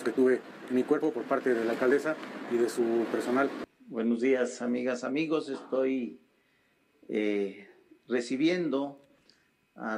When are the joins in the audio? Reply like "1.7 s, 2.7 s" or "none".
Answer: 3.6 s